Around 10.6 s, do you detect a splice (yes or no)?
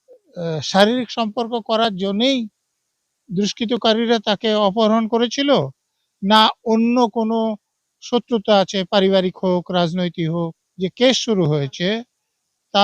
yes